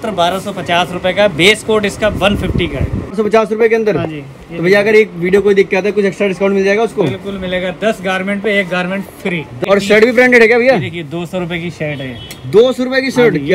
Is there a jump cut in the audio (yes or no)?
yes